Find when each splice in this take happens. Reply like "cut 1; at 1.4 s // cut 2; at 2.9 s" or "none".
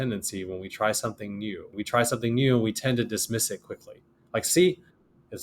cut 1; at 1.7 s